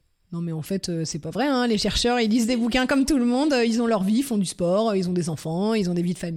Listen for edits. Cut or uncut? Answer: uncut